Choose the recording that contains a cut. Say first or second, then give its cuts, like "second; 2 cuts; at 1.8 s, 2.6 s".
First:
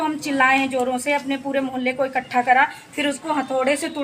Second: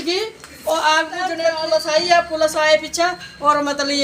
second; 1 cut; at 1.4 s